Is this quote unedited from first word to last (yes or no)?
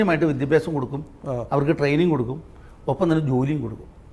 yes